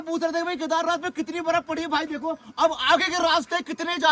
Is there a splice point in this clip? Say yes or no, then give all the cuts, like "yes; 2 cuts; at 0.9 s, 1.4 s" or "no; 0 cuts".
no; 0 cuts